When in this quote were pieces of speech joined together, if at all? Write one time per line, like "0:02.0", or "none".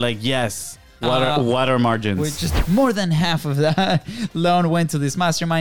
0:02.5